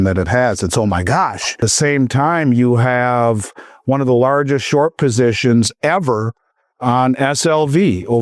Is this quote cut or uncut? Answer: cut